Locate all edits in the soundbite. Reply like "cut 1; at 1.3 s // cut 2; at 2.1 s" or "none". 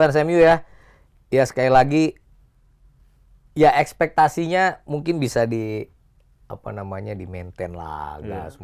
none